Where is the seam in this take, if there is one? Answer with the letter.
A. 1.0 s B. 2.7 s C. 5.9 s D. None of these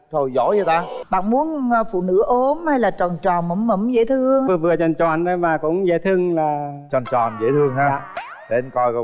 A